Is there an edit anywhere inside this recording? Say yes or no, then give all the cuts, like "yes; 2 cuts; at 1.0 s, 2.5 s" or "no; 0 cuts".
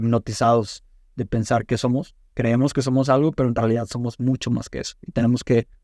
no; 0 cuts